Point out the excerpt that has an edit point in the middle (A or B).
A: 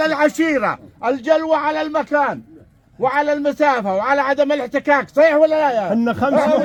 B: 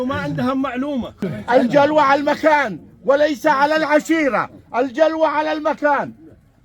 B